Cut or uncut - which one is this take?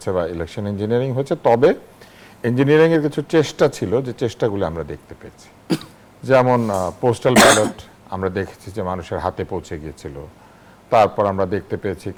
uncut